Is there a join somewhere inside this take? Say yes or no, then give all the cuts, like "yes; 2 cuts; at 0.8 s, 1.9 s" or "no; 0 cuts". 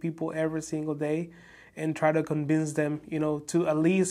no; 0 cuts